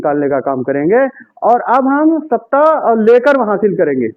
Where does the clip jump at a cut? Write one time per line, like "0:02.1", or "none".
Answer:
0:02.6